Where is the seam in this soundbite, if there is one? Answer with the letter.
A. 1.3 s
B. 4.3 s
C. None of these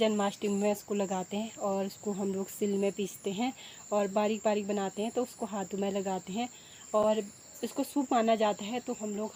C